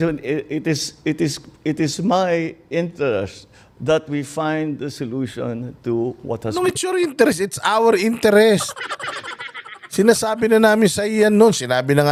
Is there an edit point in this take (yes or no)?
no